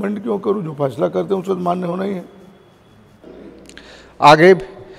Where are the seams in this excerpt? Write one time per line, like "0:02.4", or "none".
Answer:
0:03.6